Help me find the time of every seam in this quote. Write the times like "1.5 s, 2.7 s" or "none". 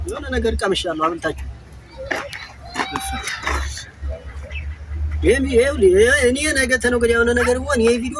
none